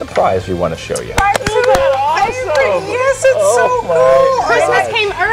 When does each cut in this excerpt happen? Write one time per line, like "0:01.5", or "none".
0:01.1